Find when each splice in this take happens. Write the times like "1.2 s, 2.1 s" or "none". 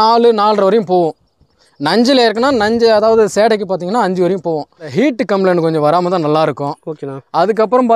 4.9 s